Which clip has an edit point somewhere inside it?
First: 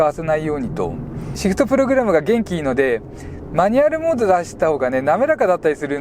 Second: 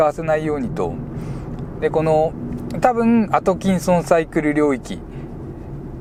first; 1 cut; at 1.3 s

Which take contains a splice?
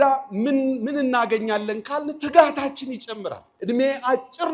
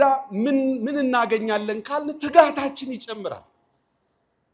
first; 1 cut; at 3.5 s

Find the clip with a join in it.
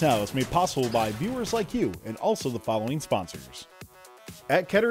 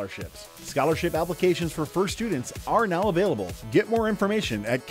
first; 1 cut; at 3.9 s

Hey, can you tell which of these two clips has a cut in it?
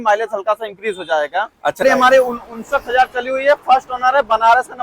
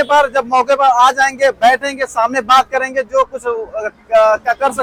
first; 1 cut; at 1.8 s

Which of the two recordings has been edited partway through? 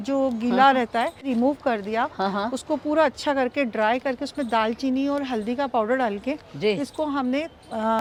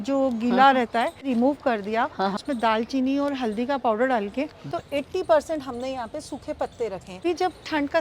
second; 3 cuts; at 2.4 s, 4.7 s, 7.2 s

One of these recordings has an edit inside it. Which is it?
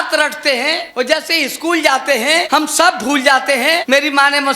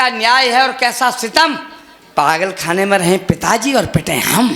first; 3 cuts; at 0.8 s, 2.5 s, 3.8 s

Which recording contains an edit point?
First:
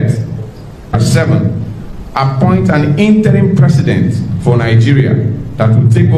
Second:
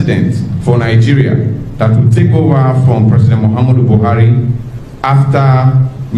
first; 1 cut; at 1.0 s

